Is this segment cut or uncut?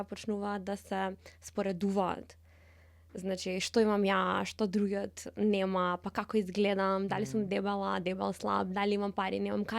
uncut